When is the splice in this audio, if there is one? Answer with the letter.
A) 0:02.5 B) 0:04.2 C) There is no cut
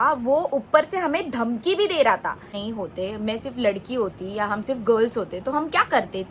A